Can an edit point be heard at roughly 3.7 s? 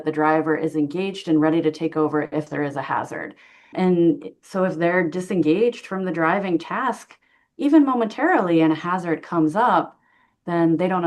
yes; 1 cut; at 3.7 s

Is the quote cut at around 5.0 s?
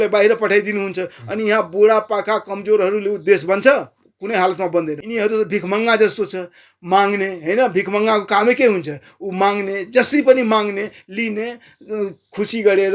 yes; 1 cut; at 5.0 s

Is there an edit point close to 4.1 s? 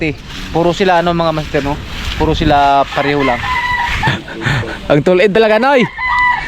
yes; 1 cut; at 4.1 s

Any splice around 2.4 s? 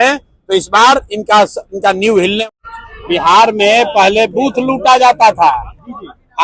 yes; 1 cut; at 2.4 s

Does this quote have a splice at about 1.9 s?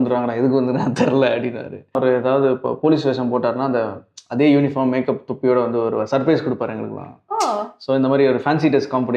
yes; 1 cut; at 1.9 s

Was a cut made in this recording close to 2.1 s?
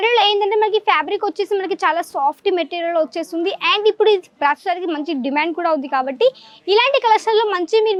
no; 0 cuts

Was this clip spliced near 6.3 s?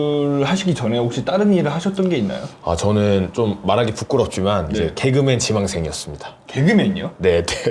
no; 0 cuts

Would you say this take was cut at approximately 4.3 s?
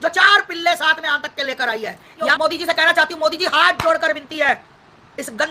no; 1 cut; at 2.3 s

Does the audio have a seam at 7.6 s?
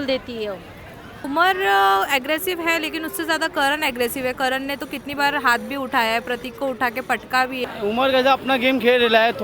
yes; 2 cuts; at 1.2 s, 7.6 s

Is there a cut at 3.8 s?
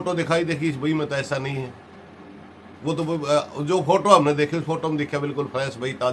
no; 0 cuts

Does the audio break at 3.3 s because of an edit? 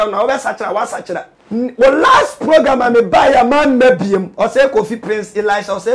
no; 1 cut; at 1.3 s

